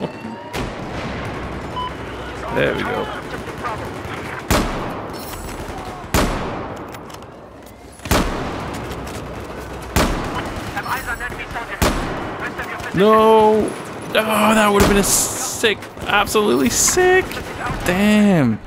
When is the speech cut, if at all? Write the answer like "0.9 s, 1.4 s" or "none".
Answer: 17.8 s